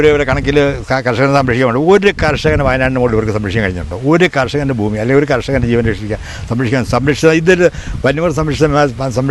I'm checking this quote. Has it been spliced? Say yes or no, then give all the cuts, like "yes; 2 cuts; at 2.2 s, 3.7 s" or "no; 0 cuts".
no; 0 cuts